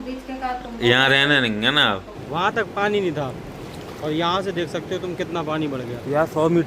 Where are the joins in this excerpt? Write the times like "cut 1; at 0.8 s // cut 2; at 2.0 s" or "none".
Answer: cut 1; at 2.2 s